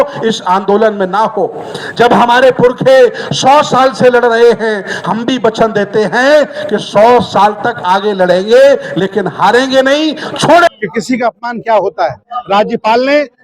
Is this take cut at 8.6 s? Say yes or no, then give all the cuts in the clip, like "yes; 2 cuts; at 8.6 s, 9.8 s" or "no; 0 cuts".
no; 1 cut; at 10.7 s